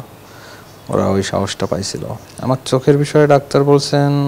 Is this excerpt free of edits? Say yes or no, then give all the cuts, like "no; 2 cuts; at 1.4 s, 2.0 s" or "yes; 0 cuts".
no; 1 cut; at 2.2 s